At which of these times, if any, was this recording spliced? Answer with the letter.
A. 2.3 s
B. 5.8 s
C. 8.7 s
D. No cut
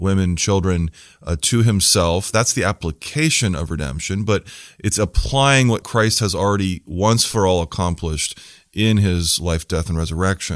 B